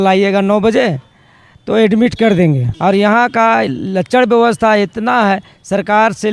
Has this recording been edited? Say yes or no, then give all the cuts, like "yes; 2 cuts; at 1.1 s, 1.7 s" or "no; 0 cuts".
yes; 1 cut; at 2.7 s